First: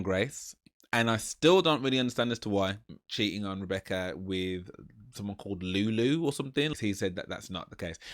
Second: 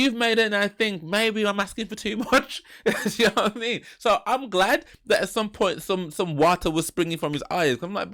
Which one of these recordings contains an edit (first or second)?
first